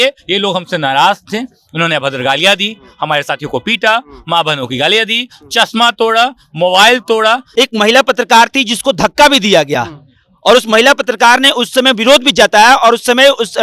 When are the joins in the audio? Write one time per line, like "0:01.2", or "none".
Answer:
0:07.4